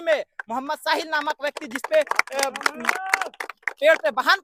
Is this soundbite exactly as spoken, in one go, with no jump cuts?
yes; 0 cuts

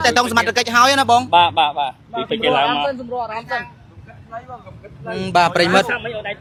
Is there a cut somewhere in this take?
no; 0 cuts

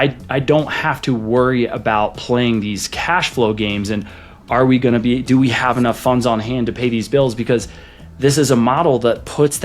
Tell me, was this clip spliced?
no; 0 cuts

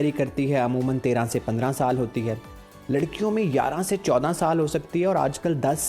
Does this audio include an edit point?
no; 0 cuts

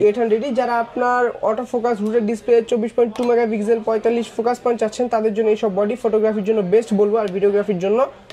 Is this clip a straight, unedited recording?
yes; 0 cuts

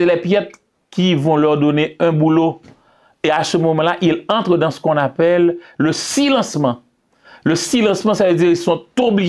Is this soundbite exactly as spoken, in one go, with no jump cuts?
yes; 0 cuts

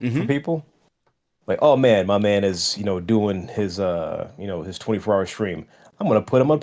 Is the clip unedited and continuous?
yes; 0 cuts

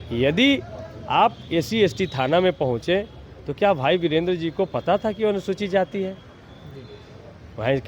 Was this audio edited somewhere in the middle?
no; 0 cuts

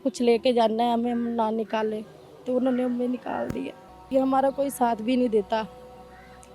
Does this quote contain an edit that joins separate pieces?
yes; 1 cut; at 4.1 s

